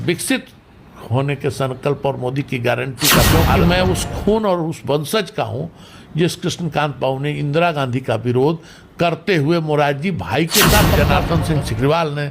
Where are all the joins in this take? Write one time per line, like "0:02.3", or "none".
0:03.3
0:11.0